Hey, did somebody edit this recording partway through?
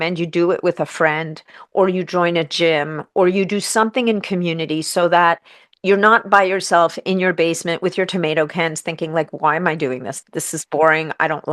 no; 0 cuts

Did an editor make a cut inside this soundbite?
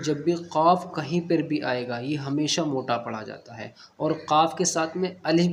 no; 0 cuts

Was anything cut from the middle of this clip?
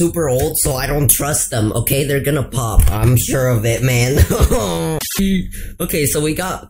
yes; 1 cut; at 5.1 s

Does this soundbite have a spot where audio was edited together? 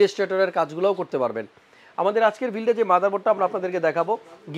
no; 0 cuts

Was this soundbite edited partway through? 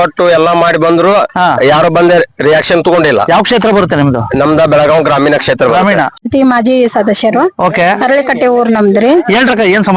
yes; 1 cut; at 6.2 s

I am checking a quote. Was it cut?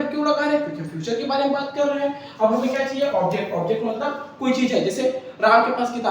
no; 0 cuts

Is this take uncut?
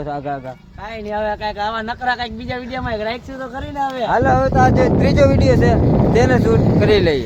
yes; 0 cuts

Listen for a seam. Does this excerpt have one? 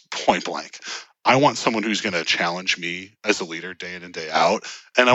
no; 0 cuts

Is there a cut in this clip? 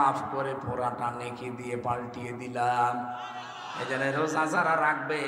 no; 0 cuts

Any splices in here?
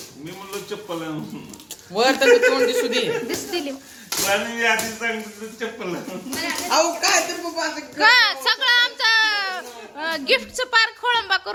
no; 0 cuts

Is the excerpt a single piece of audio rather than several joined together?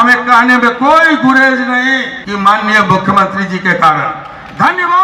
no; 1 cut; at 2.2 s

